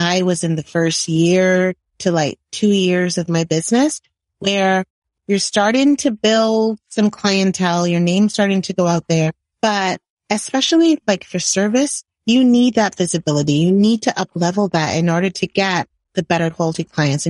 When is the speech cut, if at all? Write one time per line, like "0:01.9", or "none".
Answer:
0:05.1
0:09.4